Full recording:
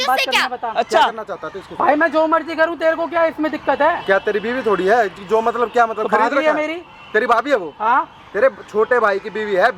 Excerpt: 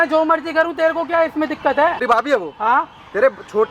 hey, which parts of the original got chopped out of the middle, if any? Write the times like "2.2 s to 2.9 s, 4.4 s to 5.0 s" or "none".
4.1 s to 7.2 s